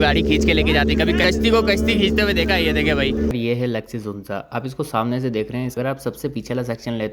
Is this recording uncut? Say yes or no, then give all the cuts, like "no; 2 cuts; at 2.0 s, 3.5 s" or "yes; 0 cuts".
no; 3 cuts; at 1.2 s, 3.3 s, 5.7 s